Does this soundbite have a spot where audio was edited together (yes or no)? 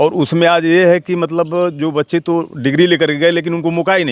no